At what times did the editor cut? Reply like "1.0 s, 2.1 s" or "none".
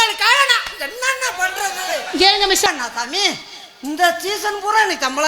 2.7 s